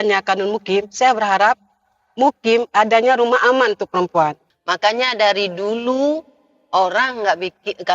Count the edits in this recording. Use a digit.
1